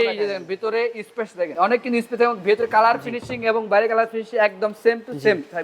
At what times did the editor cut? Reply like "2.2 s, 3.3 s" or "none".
1.5 s